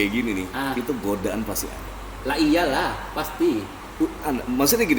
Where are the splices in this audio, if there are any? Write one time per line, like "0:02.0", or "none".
none